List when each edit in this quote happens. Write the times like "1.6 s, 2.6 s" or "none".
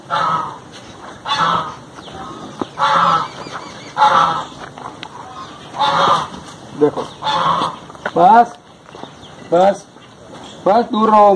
none

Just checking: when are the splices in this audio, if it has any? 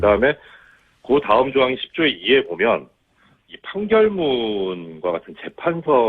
1.0 s

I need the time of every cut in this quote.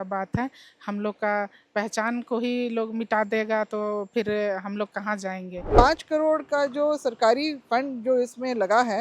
5.7 s

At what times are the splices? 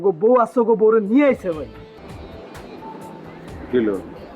2.0 s

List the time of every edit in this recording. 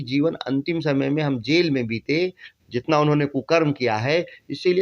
none

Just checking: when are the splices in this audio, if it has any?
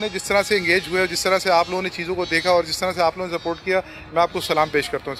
none

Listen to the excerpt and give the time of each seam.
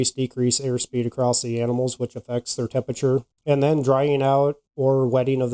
3.3 s

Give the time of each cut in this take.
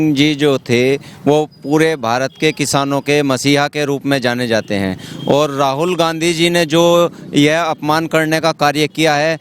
none

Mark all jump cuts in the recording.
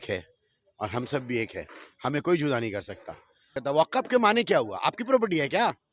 3.6 s

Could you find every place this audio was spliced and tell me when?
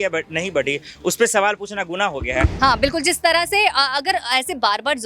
2.5 s

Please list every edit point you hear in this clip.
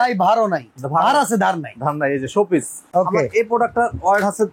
2.8 s

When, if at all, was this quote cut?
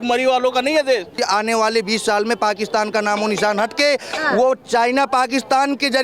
1.2 s

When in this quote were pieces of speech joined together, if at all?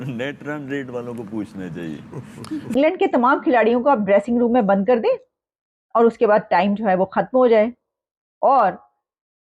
2.8 s

